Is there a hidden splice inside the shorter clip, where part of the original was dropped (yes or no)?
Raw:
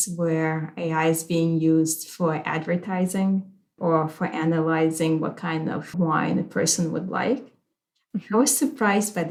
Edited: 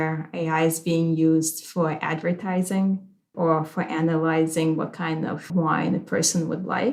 no